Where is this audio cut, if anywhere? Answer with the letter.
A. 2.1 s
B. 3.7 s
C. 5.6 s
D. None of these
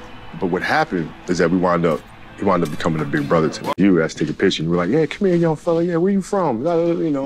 B